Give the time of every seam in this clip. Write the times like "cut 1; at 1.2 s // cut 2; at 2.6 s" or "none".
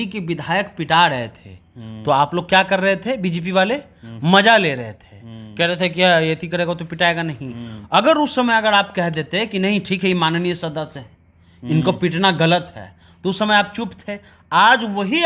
none